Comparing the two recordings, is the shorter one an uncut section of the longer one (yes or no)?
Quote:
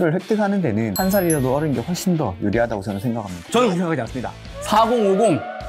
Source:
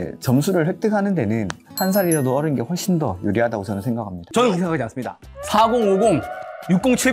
no